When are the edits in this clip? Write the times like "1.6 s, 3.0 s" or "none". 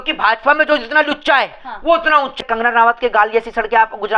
2.4 s